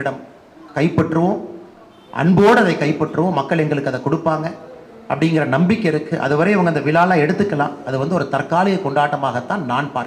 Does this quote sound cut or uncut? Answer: uncut